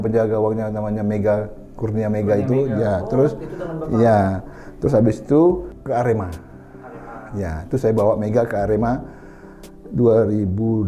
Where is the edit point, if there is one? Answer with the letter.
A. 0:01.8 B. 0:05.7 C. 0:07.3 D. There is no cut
B